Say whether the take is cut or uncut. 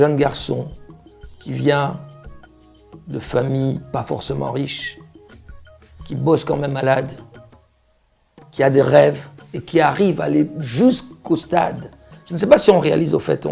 uncut